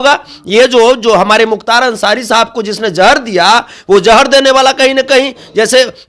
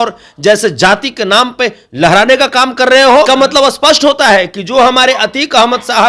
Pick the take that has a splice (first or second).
second